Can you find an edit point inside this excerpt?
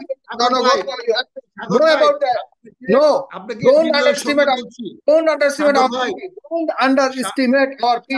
no; 0 cuts

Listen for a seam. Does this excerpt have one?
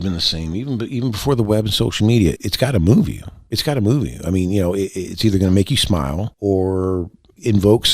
yes; 2 cuts; at 2.4 s, 6.3 s

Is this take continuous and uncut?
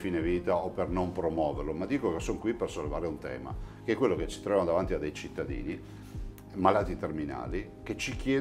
yes; 0 cuts

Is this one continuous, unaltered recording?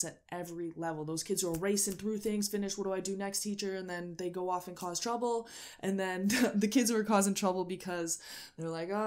yes; 0 cuts

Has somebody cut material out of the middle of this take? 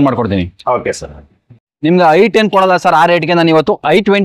yes; 1 cut; at 1.7 s

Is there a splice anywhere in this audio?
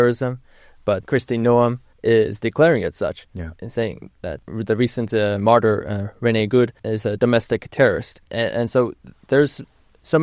yes; 5 cuts; at 1.0 s, 1.9 s, 4.4 s, 6.9 s, 8.2 s

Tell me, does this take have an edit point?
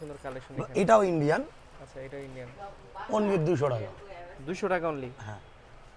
no; 0 cuts

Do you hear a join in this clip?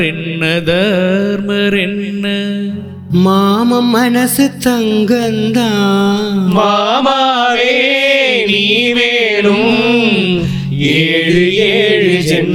no; 0 cuts

